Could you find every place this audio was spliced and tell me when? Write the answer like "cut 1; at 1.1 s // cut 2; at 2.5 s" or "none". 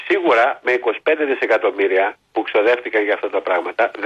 cut 1; at 2.2 s